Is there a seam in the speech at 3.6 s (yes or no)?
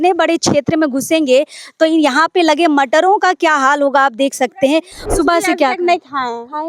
no